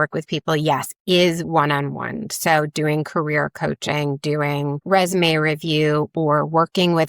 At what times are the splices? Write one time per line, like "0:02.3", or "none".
none